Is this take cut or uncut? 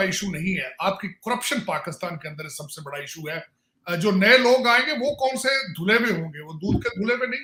uncut